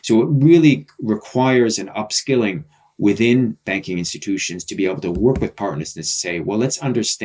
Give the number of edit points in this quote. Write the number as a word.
zero